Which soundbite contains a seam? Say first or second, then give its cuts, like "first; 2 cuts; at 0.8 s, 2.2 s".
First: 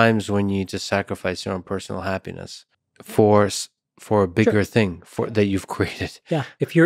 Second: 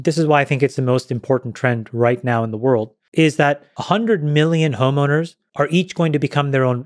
second; 3 cuts; at 3.0 s, 3.7 s, 5.4 s